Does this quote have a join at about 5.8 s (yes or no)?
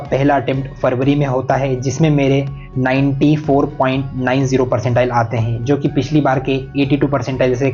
no